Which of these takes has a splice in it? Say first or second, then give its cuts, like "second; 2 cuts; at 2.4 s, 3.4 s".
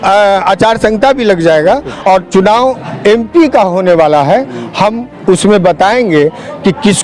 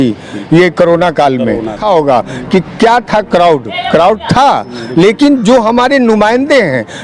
second; 1 cut; at 1.8 s